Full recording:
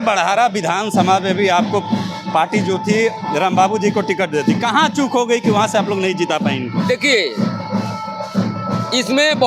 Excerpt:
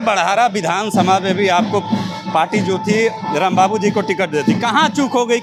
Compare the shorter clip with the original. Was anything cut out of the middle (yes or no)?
no